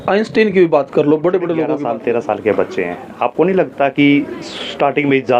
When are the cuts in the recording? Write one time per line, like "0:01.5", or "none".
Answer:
0:01.8